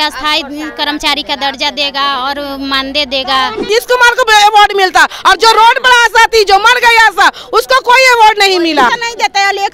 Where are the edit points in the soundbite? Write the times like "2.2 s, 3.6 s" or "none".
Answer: 3.7 s, 8.9 s